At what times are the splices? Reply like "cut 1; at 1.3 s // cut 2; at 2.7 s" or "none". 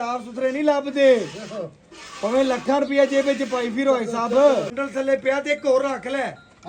cut 1; at 4.7 s